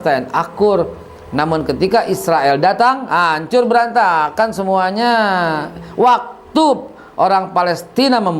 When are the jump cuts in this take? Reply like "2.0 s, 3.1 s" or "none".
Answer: none